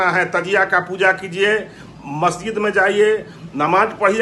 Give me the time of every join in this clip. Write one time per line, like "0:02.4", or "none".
none